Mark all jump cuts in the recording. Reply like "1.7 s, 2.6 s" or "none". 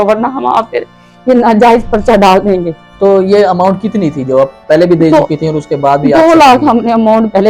2.8 s